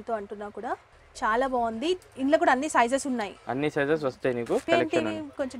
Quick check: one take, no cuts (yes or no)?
no